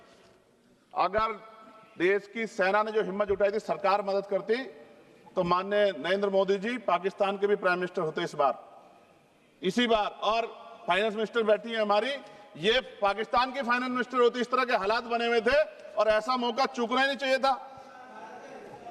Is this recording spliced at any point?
no; 0 cuts

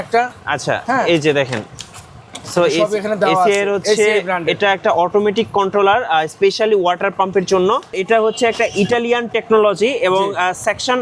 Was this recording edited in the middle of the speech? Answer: yes; 1 cut; at 7.9 s

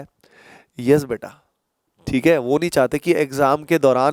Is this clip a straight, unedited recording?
yes; 0 cuts

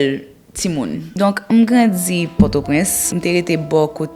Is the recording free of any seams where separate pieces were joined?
no; 2 cuts; at 1.5 s, 3.1 s

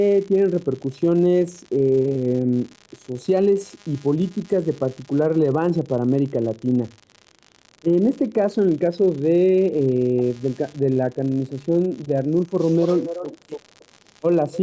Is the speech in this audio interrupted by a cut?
no; 0 cuts

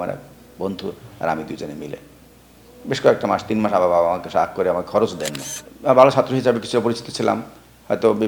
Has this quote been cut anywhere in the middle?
yes; 1 cut; at 5.7 s

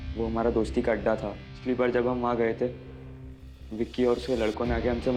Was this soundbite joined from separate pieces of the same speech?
no; 0 cuts

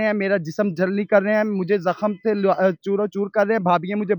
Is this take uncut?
yes; 0 cuts

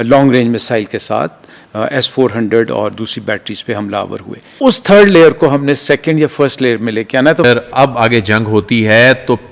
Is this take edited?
yes; 2 cuts; at 4.5 s, 7.4 s

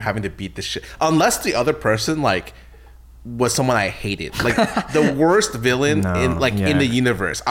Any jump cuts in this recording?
no; 0 cuts

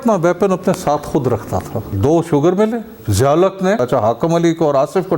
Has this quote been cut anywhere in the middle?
yes; 3 cuts; at 1.9 s, 3.0 s, 3.8 s

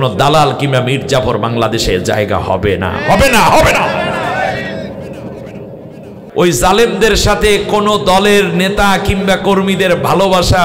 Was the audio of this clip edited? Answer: yes; 1 cut; at 6.2 s

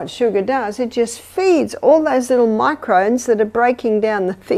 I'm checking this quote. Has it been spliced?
no; 0 cuts

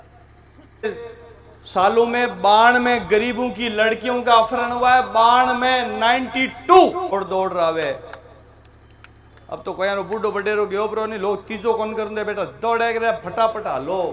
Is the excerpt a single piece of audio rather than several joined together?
no; 2 cuts; at 0.9 s, 7.1 s

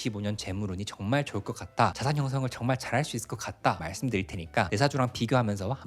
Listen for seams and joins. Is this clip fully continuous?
no; 1 cut; at 3.8 s

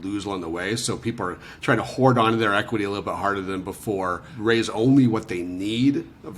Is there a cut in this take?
yes; 1 cut; at 4.3 s

